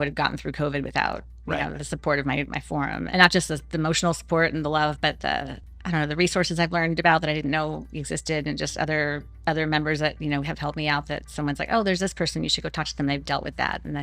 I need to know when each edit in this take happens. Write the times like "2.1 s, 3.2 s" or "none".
3.0 s, 5.6 s